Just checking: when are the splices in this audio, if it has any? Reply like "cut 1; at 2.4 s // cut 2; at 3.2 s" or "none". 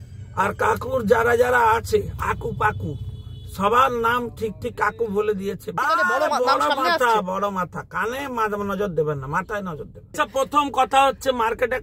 cut 1; at 5.7 s // cut 2; at 10.2 s